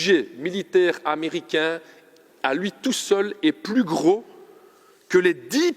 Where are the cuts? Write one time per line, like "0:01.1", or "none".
none